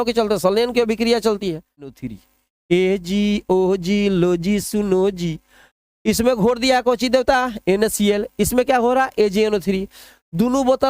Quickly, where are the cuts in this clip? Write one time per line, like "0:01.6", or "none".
0:02.1